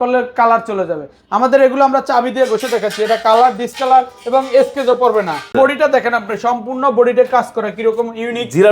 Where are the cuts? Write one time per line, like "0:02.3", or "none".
0:05.5